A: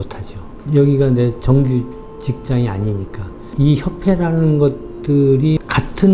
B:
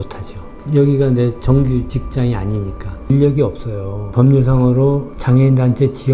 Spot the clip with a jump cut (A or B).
B